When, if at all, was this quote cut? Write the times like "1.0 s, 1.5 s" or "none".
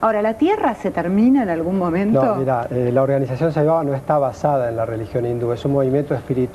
2.3 s